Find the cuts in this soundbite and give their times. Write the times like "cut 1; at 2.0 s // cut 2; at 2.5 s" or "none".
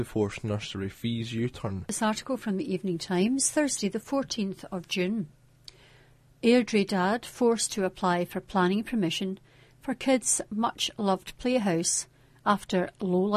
cut 1; at 1.8 s